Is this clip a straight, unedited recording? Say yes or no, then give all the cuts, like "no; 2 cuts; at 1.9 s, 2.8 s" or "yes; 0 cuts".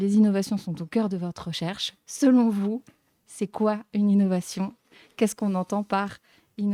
yes; 0 cuts